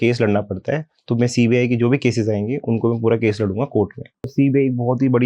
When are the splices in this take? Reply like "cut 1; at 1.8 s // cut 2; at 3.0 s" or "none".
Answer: cut 1; at 4.2 s